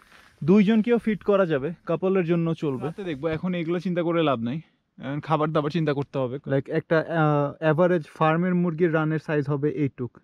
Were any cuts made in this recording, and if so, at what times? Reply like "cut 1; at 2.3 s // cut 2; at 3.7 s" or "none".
cut 1; at 3.1 s // cut 2; at 6.4 s